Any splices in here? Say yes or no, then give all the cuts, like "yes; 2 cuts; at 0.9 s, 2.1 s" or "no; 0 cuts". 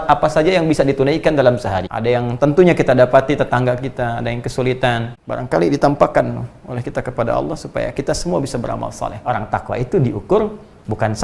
yes; 3 cuts; at 1.8 s, 5.2 s, 9.2 s